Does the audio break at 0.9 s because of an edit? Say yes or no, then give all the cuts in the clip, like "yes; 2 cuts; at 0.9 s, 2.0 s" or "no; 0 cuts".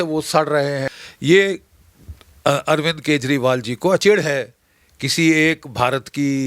yes; 2 cuts; at 0.9 s, 4.0 s